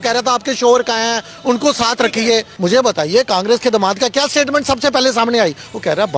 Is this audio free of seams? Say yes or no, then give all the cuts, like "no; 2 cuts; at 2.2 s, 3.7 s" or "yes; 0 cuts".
no; 1 cut; at 2.5 s